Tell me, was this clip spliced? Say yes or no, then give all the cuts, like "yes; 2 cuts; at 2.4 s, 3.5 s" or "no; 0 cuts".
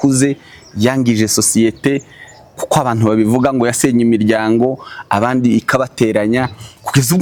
no; 0 cuts